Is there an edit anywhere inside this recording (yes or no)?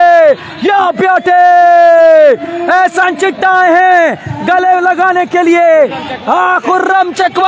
no